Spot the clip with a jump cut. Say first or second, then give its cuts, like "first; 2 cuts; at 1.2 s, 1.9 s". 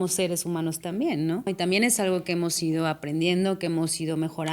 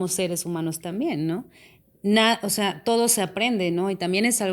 first; 1 cut; at 1.5 s